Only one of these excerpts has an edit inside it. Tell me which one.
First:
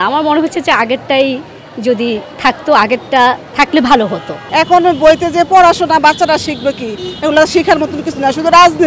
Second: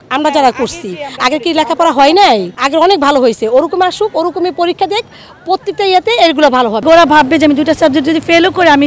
second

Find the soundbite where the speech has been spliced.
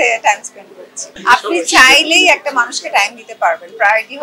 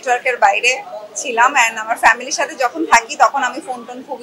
first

